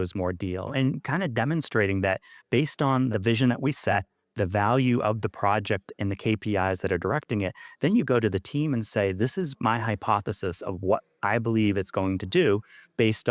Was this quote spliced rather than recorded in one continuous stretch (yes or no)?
yes